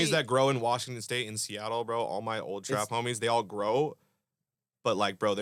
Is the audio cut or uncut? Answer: uncut